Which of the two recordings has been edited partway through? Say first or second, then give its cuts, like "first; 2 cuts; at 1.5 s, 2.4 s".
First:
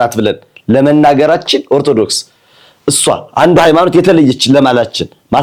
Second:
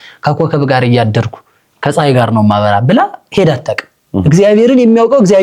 second; 1 cut; at 4.1 s